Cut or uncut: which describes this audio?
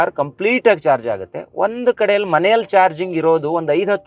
uncut